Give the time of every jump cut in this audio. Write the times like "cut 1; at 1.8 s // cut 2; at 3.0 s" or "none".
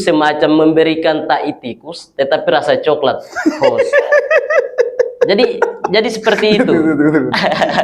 none